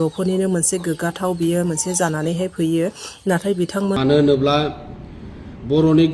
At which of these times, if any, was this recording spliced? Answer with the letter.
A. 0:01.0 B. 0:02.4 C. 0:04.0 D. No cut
C